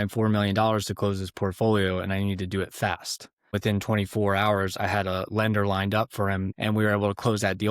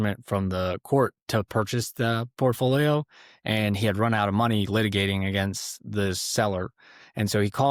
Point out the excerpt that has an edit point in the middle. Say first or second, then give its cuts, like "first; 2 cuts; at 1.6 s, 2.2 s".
first; 2 cuts; at 3.6 s, 6.5 s